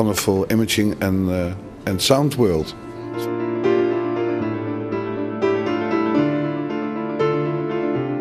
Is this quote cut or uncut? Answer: cut